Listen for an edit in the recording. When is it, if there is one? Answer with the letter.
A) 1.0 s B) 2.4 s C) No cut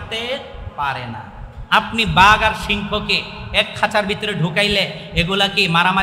C